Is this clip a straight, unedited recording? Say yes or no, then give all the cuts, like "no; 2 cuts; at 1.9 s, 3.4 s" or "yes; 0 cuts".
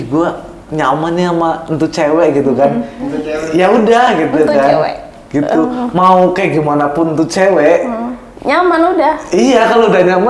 yes; 0 cuts